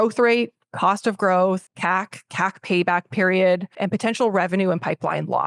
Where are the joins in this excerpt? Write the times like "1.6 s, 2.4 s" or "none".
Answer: 1.7 s, 3.7 s